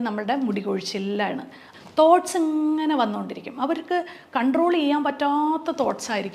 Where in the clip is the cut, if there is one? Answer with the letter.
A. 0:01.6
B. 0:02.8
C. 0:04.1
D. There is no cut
A